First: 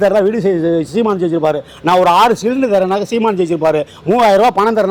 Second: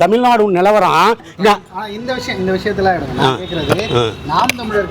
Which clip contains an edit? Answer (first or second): second